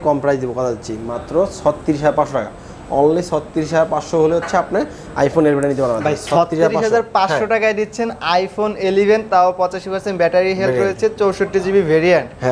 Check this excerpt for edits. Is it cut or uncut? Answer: uncut